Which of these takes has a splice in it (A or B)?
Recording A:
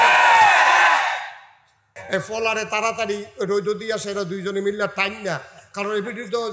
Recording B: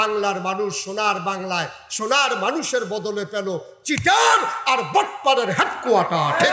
A